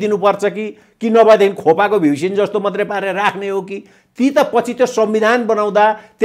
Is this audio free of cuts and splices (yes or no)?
yes